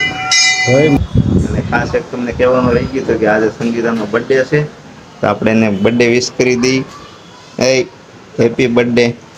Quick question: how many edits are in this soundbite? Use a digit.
1